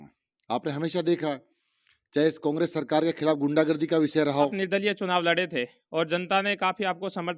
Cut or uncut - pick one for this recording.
cut